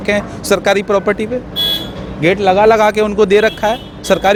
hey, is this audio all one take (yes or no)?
yes